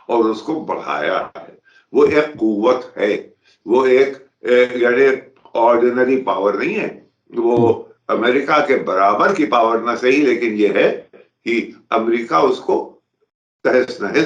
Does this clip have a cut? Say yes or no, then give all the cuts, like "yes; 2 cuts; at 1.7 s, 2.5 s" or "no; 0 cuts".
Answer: no; 0 cuts